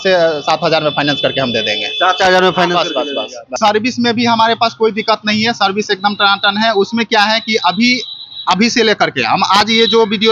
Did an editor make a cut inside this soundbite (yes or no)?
yes